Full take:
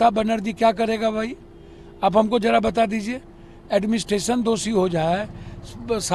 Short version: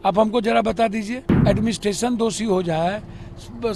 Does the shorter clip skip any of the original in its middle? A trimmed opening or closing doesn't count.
yes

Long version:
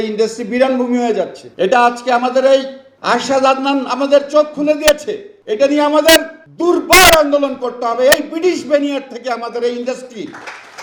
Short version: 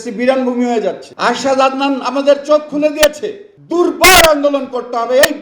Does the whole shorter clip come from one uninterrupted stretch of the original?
no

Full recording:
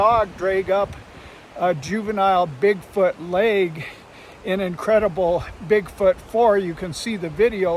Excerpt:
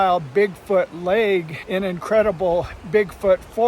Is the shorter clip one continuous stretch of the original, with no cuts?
no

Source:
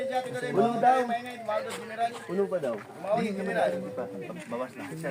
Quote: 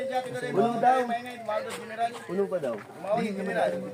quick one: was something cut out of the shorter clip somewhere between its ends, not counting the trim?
no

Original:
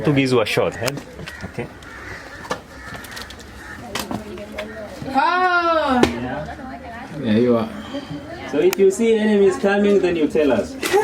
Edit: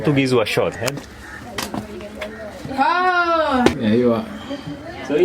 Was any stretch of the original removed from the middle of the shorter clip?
yes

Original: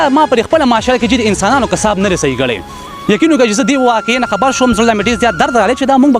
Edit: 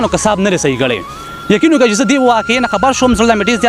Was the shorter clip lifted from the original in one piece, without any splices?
yes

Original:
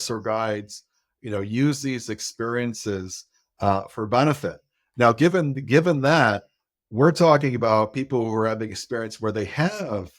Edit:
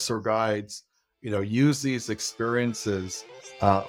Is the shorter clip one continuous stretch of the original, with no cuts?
yes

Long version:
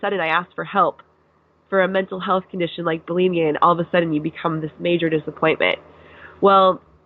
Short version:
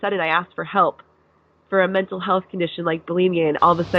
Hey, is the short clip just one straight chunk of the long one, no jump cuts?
yes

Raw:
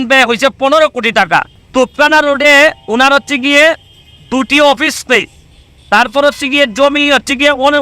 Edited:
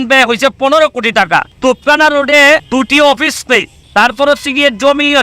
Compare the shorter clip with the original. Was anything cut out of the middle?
yes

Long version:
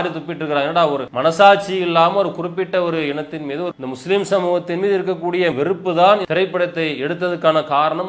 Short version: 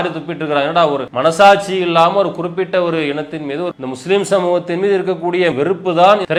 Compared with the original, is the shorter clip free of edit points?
yes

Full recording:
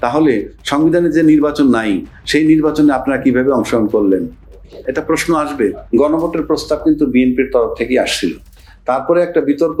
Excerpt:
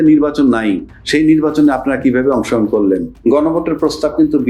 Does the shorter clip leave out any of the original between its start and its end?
yes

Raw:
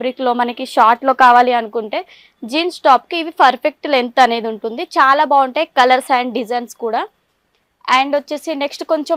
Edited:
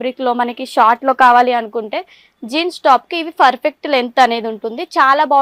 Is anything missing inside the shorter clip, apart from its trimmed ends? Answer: no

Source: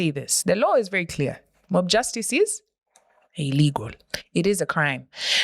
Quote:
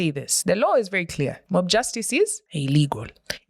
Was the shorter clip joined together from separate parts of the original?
yes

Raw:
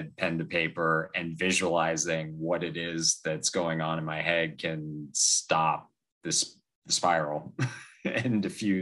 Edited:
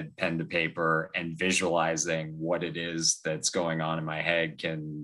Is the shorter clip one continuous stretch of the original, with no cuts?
yes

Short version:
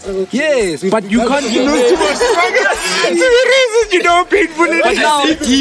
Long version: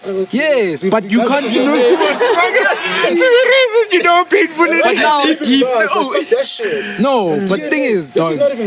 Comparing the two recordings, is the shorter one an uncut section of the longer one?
yes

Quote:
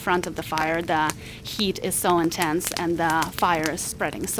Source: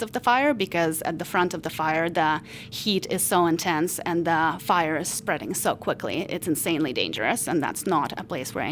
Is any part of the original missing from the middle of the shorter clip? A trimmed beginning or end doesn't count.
no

